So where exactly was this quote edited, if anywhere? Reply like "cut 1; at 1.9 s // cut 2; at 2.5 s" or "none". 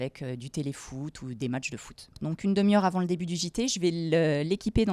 cut 1; at 2.3 s